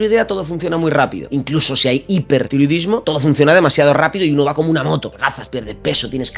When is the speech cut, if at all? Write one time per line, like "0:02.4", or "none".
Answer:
0:01.2
0:02.8
0:05.1